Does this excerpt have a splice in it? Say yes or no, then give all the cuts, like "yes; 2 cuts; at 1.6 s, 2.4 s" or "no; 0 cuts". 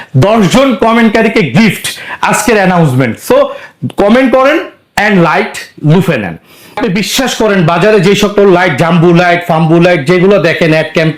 yes; 1 cut; at 6.8 s